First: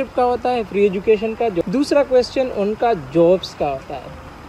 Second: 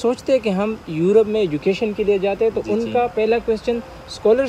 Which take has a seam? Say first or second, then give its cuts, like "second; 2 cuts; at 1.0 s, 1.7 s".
first; 1 cut; at 1.6 s